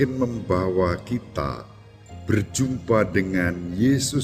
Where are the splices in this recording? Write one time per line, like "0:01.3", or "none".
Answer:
none